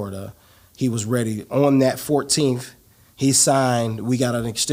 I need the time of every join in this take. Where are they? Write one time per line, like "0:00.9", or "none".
none